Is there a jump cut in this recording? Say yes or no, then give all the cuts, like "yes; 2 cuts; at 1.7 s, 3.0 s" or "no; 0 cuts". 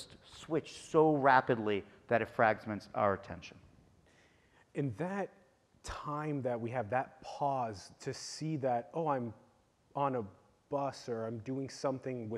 no; 0 cuts